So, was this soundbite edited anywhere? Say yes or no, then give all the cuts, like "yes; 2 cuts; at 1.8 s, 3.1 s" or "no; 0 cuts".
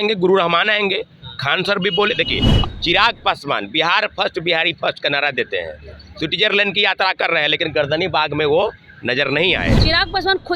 yes; 2 cuts; at 2.5 s, 9.8 s